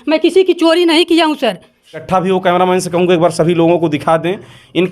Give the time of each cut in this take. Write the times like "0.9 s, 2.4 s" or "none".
2.0 s